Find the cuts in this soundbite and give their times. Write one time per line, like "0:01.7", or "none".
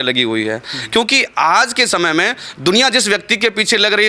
none

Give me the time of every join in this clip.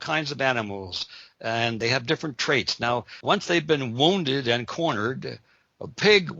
0:01.8
0:03.1

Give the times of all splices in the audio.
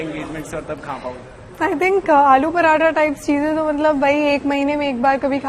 none

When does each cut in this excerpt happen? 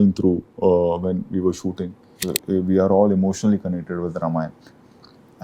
0:02.2

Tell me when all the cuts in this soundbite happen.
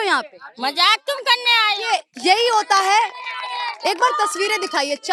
none

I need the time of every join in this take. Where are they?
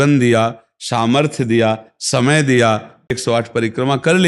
0:03.2

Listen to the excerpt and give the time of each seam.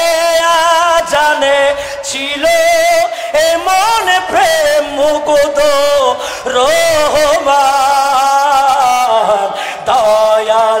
none

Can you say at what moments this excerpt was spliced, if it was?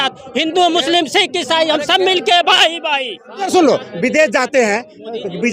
0:03.5

